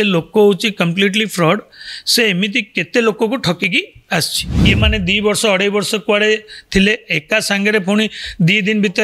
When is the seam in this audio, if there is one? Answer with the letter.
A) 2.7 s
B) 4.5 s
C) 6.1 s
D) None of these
B